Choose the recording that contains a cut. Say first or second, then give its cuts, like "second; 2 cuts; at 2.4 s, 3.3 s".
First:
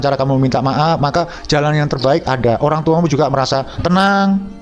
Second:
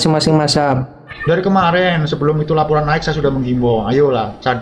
second; 1 cut; at 1.1 s